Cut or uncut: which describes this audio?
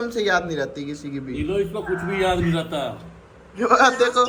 uncut